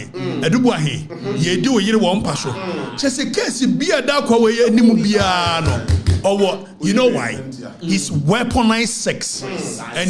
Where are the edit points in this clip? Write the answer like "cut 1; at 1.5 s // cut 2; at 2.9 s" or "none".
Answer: none